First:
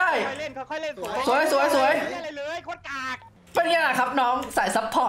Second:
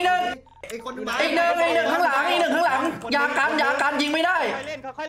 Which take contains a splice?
first; 1 cut; at 3.3 s

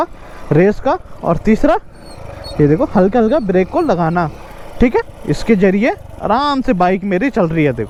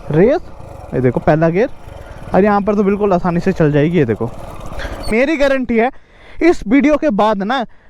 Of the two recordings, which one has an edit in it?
second; 1 cut; at 5.1 s

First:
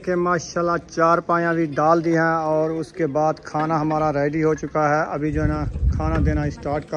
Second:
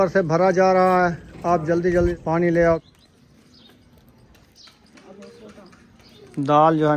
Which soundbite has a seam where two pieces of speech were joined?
second; 2 cuts; at 2.1 s, 2.8 s

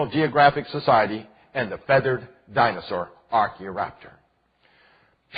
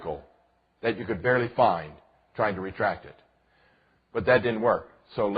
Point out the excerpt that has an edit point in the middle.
second; 1 cut; at 4.4 s

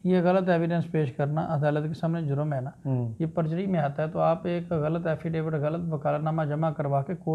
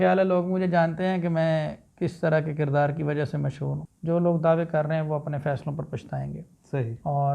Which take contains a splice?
second; 1 cut; at 3.8 s

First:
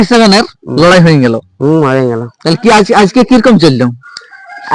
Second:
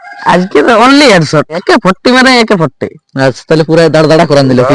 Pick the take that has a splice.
second; 1 cut; at 1.6 s

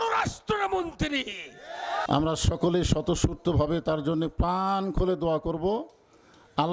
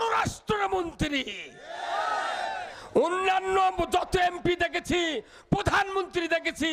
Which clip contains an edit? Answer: first; 1 cut; at 2.0 s

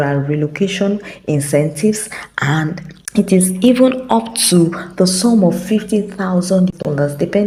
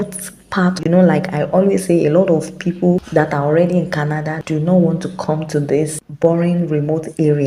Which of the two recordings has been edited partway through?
second; 3 cuts; at 0.8 s, 3.0 s, 4.3 s

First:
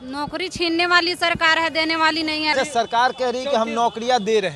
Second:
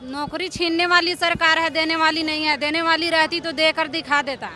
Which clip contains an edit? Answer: first; 1 cut; at 2.5 s

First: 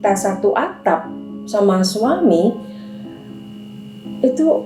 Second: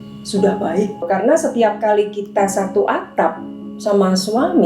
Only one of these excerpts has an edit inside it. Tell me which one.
second; 1 cut; at 1.0 s

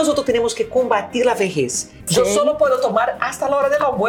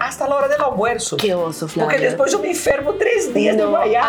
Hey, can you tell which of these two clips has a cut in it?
first; 1 cut; at 2.1 s

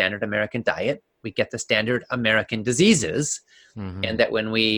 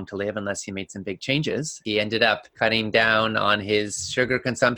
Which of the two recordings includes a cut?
second; 2 cuts; at 1.8 s, 2.5 s

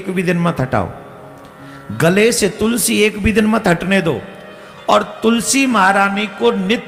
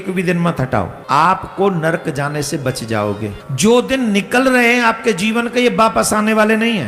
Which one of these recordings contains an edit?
second; 2 cuts; at 1.0 s, 3.4 s

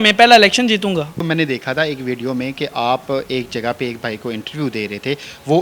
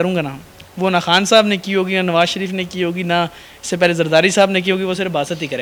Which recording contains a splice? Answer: first; 1 cut; at 1.2 s

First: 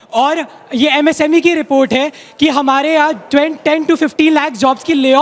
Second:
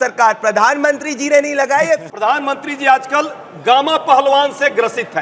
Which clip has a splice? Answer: second; 1 cut; at 2.0 s

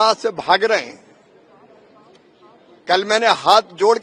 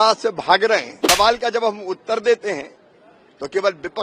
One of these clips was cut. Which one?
second; 1 cut; at 1.0 s

